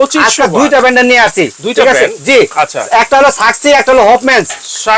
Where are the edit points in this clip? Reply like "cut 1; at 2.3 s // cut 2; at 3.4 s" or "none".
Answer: none